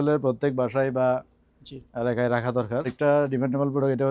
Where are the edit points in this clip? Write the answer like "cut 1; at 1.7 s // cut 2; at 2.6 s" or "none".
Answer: cut 1; at 2.9 s